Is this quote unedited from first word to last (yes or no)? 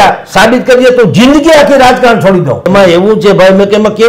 no